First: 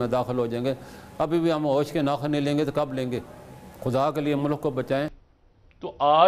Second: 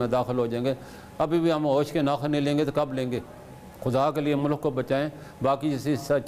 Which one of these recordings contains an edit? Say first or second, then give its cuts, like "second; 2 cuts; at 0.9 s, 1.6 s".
first; 1 cut; at 5.2 s